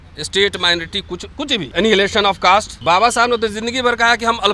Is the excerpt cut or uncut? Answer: cut